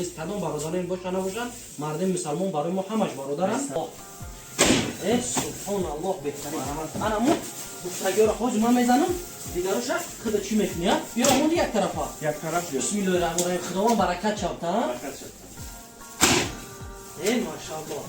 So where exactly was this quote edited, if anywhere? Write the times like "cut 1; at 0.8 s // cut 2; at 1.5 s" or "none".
cut 1; at 3.8 s